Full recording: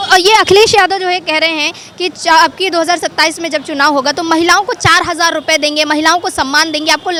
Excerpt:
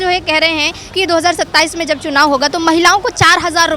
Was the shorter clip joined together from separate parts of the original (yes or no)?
yes